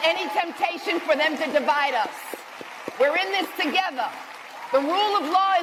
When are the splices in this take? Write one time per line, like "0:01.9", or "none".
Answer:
none